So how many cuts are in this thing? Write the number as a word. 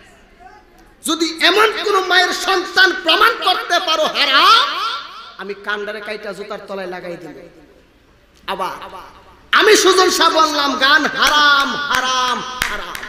zero